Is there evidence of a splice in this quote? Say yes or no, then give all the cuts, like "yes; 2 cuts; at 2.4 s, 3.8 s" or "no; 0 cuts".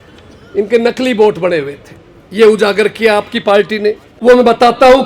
yes; 1 cut; at 4.1 s